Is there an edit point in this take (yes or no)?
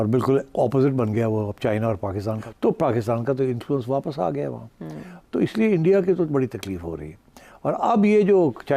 yes